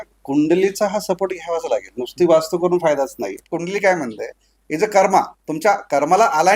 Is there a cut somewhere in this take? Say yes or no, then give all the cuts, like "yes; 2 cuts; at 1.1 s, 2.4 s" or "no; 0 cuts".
yes; 1 cut; at 3.4 s